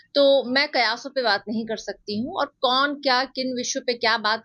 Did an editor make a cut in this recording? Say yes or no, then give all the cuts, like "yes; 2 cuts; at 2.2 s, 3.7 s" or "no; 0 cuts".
no; 0 cuts